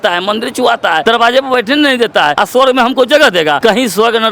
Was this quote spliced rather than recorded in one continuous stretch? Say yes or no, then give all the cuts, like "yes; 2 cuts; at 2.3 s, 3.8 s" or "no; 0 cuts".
yes; 3 cuts; at 1.0 s, 2.4 s, 3.6 s